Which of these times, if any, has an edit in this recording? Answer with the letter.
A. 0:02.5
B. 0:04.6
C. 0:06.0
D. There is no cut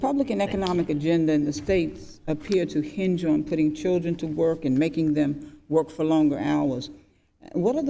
D